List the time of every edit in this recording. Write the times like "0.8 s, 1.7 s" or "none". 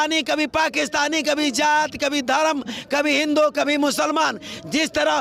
none